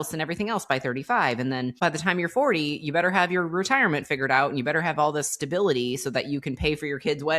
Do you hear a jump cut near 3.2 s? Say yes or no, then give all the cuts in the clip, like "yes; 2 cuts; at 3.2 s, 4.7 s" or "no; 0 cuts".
no; 1 cut; at 1.8 s